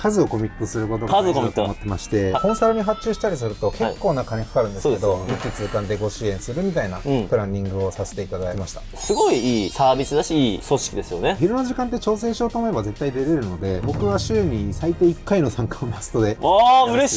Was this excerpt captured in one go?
no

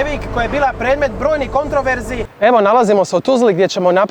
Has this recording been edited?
yes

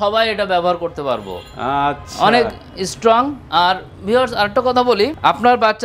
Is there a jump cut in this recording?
no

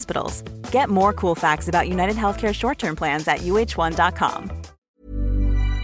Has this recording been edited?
yes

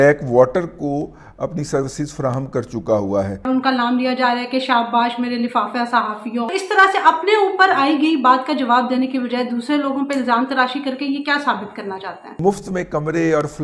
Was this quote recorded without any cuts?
no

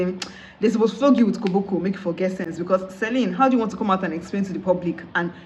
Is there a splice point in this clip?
no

